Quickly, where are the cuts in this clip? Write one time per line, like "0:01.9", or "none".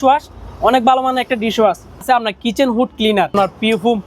0:02.0
0:03.3